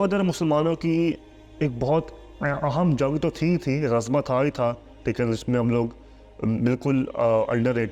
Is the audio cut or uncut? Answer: uncut